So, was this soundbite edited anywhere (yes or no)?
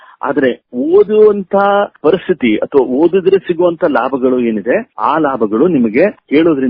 no